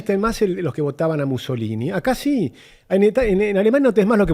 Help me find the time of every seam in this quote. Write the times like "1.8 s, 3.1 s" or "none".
none